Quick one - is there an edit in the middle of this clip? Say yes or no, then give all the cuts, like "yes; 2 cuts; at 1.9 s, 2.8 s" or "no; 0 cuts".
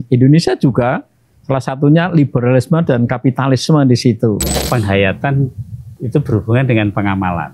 yes; 1 cut; at 4.6 s